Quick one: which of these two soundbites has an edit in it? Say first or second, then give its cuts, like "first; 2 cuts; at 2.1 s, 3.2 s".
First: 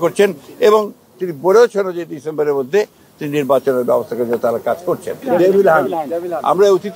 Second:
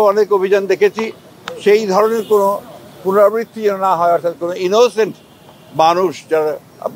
first; 1 cut; at 5.2 s